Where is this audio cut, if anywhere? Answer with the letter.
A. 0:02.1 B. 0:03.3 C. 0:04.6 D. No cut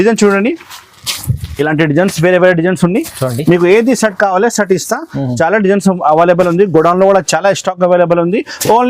D